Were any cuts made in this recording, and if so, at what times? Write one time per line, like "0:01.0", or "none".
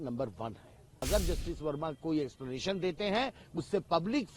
0:01.0